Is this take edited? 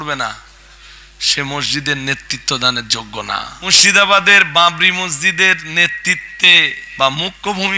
yes; 2 cuts; at 3.6 s, 6.8 s

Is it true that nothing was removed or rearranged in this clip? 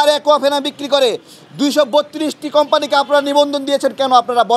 yes; 0 cuts

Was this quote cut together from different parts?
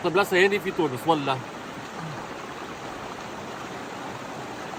no; 0 cuts

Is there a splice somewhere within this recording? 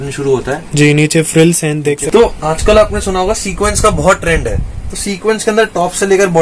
yes; 1 cut; at 2.0 s

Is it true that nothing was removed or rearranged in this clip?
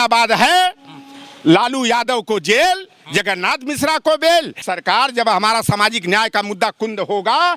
no; 1 cut; at 4.6 s

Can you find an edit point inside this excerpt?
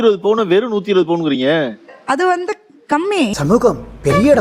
yes; 1 cut; at 3.3 s

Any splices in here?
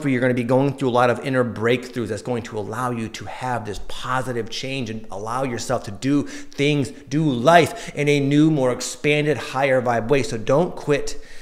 no; 0 cuts

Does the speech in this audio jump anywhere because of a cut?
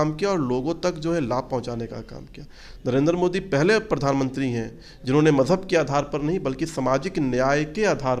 no; 0 cuts

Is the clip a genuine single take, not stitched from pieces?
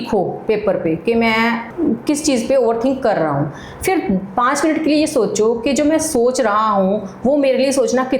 no; 1 cut; at 1.7 s

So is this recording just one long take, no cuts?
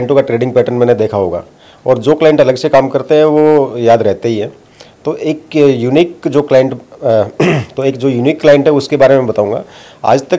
yes; 0 cuts

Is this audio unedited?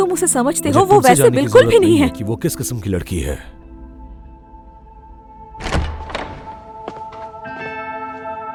yes; 0 cuts

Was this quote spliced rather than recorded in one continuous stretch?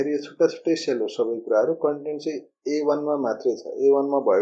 no; 0 cuts

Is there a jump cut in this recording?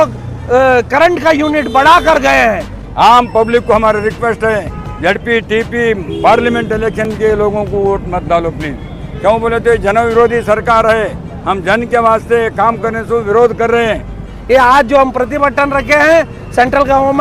yes; 2 cuts; at 2.8 s, 14.3 s

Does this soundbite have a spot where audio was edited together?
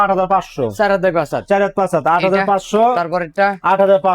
no; 0 cuts

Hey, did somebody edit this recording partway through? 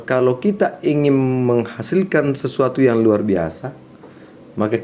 no; 0 cuts

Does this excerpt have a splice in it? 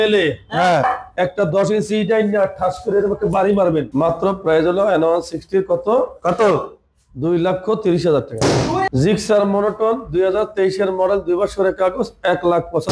yes; 2 cuts; at 3.9 s, 8.9 s

